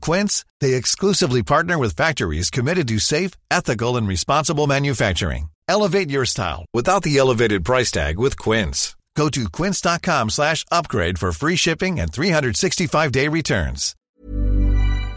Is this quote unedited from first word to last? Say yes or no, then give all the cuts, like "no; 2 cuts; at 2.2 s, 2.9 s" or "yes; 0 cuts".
no; 1 cut; at 14.0 s